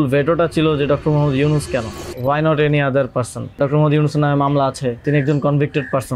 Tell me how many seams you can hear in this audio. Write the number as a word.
three